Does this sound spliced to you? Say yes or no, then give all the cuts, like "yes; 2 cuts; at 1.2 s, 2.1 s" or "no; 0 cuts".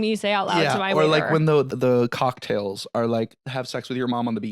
yes; 2 cuts; at 1.7 s, 3.4 s